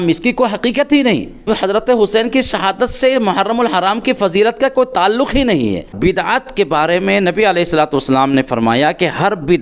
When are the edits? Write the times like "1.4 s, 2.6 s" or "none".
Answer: 1.4 s, 5.9 s